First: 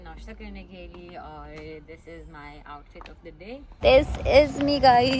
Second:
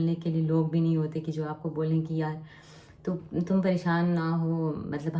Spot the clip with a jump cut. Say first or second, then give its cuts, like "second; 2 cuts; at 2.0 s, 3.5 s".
first; 1 cut; at 3.7 s